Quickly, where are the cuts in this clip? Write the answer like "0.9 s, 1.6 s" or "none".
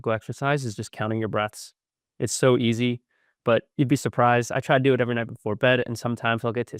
none